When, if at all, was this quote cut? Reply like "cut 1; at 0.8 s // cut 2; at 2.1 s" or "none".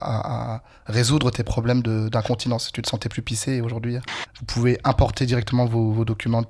cut 1; at 4.0 s